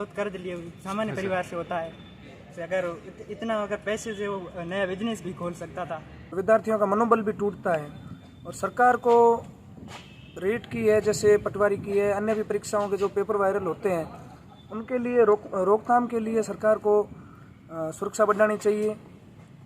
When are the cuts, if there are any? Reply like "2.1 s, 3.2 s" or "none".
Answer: 6.3 s